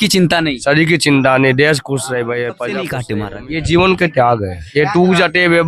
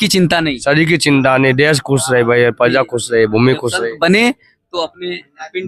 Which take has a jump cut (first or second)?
first